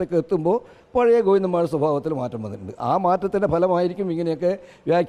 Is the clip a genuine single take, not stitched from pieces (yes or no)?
yes